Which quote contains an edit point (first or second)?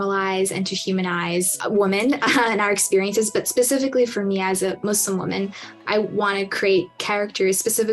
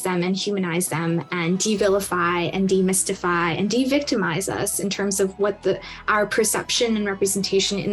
first